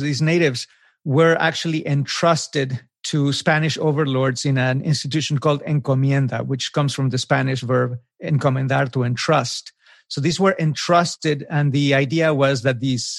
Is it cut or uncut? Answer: uncut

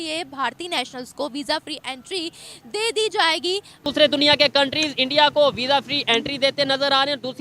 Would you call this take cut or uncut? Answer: cut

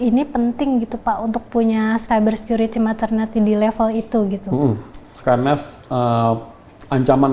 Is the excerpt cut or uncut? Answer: cut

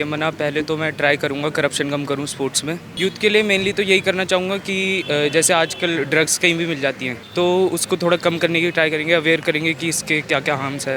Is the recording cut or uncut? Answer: cut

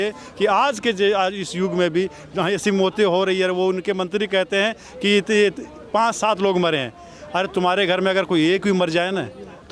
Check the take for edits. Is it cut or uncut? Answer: uncut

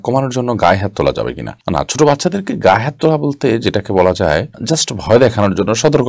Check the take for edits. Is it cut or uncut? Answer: uncut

